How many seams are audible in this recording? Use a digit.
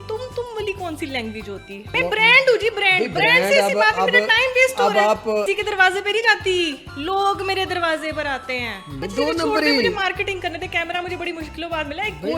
3